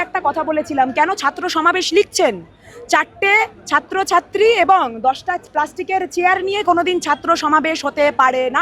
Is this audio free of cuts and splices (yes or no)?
yes